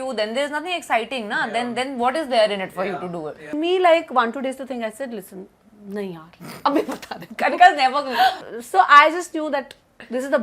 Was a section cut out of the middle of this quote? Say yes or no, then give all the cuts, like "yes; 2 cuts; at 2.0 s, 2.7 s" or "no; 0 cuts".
yes; 2 cuts; at 3.5 s, 8.4 s